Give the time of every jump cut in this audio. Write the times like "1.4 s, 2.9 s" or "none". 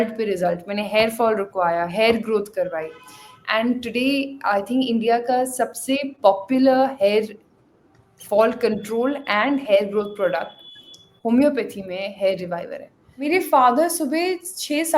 13.1 s